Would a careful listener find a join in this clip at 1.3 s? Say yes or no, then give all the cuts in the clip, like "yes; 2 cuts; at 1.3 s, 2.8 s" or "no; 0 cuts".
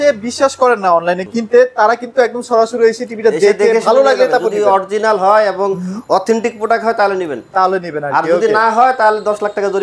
yes; 1 cut; at 1.3 s